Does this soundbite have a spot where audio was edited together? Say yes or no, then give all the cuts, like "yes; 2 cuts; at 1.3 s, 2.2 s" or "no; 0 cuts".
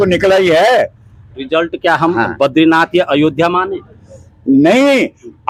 no; 0 cuts